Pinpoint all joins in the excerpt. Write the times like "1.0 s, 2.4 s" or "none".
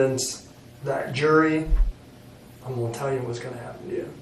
1.8 s